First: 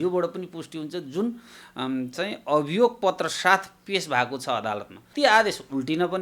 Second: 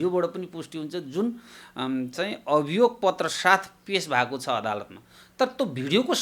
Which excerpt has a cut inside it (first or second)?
first